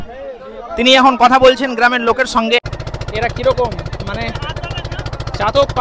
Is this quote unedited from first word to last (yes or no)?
no